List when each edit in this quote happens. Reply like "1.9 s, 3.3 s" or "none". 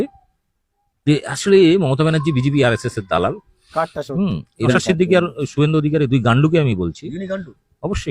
4.7 s

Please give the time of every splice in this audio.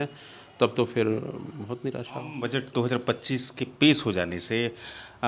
2.3 s

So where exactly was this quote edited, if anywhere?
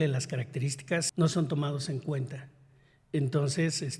1.1 s

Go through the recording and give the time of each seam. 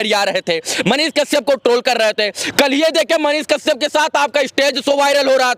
none

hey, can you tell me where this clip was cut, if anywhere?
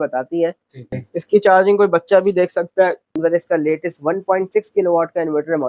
0.9 s, 3.2 s

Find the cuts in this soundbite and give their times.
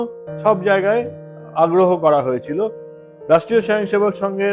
none

